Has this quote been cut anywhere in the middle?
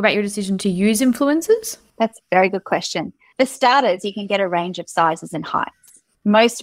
no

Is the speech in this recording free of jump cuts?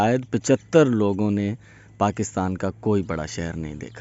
yes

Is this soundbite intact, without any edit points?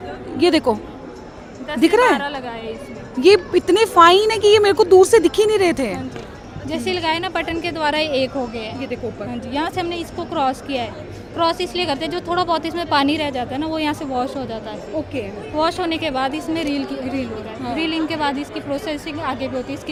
yes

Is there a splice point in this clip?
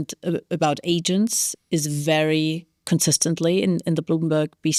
no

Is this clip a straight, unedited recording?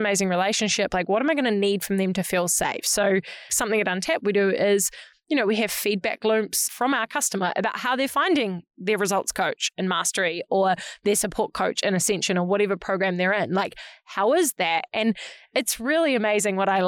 no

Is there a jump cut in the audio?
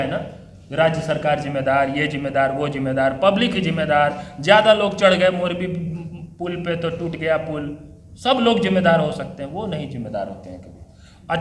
no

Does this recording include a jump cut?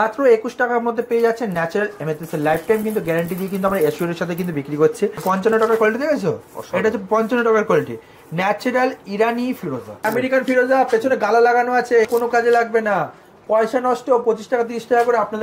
yes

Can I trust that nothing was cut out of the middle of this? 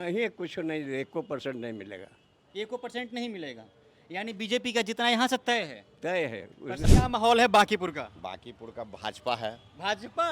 no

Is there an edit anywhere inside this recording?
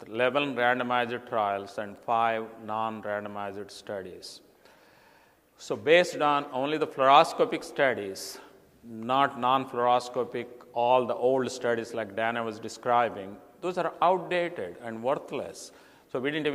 yes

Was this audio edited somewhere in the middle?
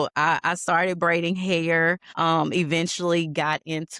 yes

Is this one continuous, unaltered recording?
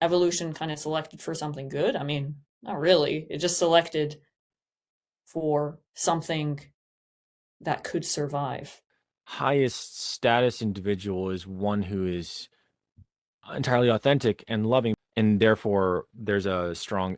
no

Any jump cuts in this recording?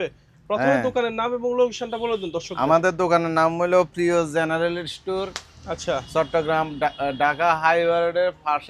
no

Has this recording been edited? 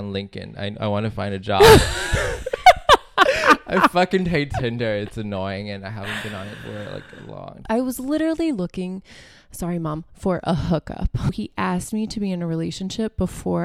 yes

